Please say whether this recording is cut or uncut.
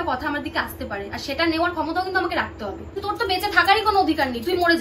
cut